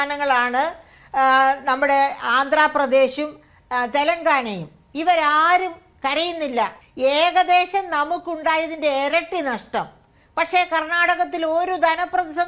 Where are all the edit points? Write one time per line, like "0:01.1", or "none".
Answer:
0:06.8